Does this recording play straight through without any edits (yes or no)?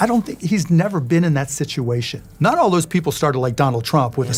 yes